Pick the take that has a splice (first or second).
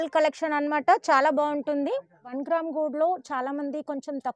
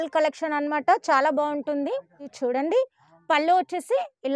first